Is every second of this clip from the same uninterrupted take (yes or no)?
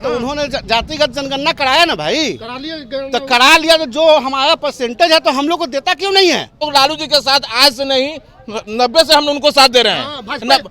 no